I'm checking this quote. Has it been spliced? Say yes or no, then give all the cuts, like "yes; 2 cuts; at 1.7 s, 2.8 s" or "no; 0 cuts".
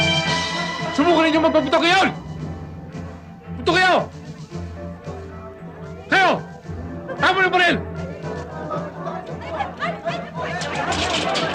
no; 0 cuts